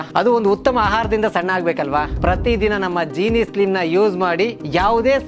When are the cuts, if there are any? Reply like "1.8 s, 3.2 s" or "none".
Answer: none